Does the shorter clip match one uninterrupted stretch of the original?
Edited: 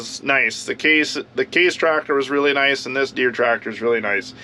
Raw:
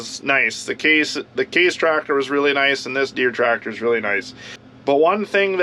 yes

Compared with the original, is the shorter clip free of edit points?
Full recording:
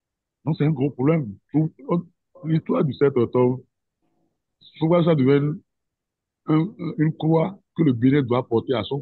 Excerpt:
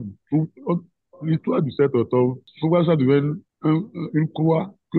no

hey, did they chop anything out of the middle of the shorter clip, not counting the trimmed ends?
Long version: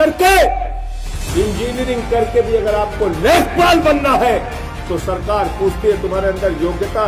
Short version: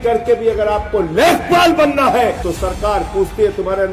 yes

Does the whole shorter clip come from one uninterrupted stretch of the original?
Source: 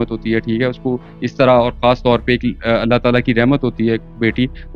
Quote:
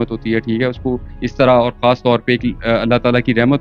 yes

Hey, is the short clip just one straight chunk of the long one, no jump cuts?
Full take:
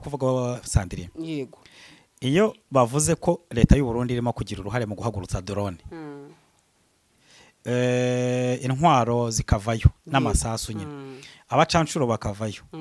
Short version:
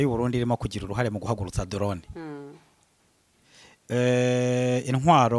yes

